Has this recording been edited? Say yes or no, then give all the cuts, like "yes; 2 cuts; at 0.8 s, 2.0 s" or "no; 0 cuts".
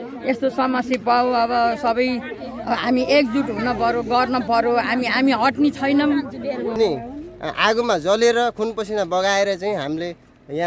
yes; 1 cut; at 6.8 s